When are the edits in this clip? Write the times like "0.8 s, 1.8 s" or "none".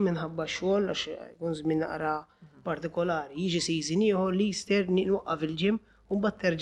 none